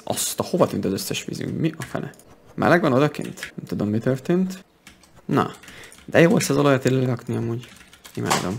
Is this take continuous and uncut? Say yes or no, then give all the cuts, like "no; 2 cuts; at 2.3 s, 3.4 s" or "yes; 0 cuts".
no; 2 cuts; at 3.6 s, 4.6 s